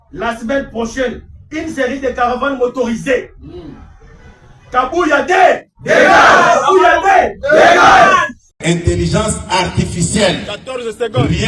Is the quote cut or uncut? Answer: cut